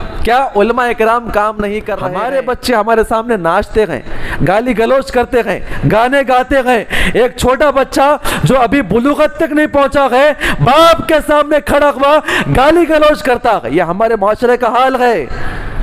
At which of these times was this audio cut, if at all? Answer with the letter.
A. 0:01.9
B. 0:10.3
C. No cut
A